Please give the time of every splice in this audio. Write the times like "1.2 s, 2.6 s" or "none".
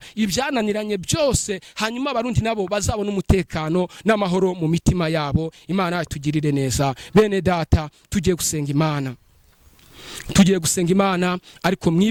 none